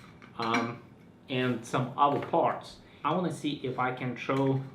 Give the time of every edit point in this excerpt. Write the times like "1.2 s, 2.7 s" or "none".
3.0 s